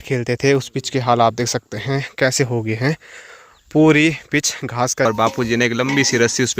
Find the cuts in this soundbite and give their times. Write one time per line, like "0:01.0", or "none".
0:05.1